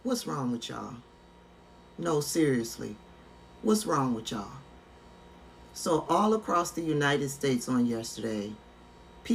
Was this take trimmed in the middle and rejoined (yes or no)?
no